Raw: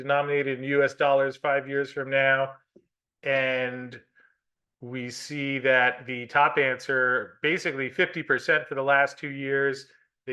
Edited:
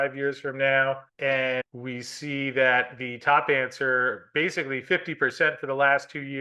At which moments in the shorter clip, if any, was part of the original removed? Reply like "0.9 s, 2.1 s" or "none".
1.1 s, 1.7 s